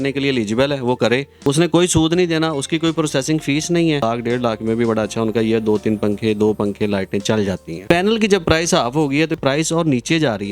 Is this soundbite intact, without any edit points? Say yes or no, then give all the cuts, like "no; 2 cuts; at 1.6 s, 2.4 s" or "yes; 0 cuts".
no; 4 cuts; at 1.3 s, 4.0 s, 7.8 s, 9.4 s